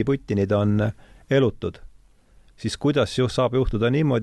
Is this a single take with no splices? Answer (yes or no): yes